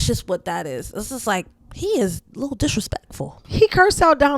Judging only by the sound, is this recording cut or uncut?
cut